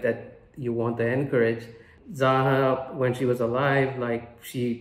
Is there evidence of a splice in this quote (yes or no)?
yes